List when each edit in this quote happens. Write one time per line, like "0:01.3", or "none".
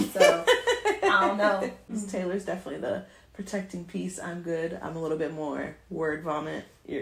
0:01.9